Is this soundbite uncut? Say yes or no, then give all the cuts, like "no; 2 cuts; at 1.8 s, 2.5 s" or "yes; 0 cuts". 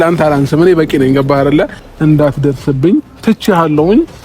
no; 1 cut; at 1.8 s